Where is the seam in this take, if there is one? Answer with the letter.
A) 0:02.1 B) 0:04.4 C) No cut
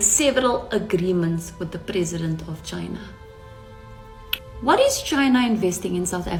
C